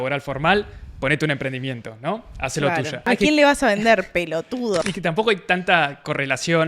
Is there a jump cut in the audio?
yes; 2 cuts; at 3.1 s, 4.8 s

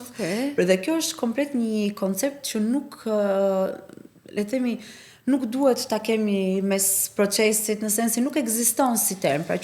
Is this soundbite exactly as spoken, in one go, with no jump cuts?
yes; 0 cuts

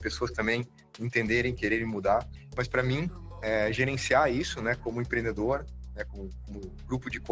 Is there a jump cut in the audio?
yes; 1 cut; at 2.4 s

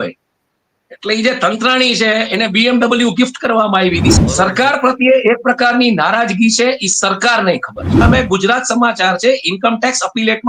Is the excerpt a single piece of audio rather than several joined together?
no; 2 cuts; at 4.1 s, 8.0 s

